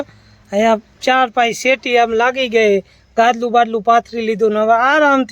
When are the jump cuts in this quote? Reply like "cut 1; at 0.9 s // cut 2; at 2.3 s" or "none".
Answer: none